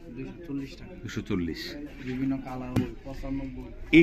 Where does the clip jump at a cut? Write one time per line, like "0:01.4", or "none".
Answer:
0:02.8

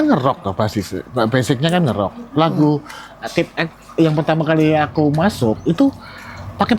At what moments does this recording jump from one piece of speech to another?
none

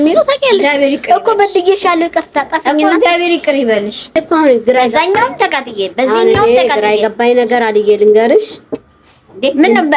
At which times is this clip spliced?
0:04.1

